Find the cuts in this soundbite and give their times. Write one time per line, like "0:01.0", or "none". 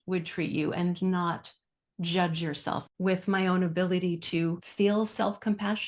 0:02.8
0:04.6